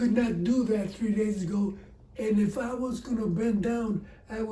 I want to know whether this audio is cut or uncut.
uncut